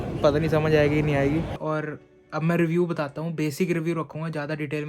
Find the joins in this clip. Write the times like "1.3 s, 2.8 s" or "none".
1.6 s